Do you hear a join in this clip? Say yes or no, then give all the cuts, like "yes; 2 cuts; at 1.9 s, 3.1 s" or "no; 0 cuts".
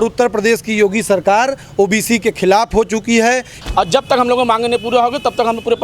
yes; 1 cut; at 3.5 s